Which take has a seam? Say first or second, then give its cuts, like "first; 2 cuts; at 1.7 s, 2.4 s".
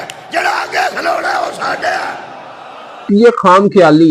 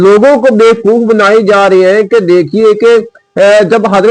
first; 1 cut; at 3.1 s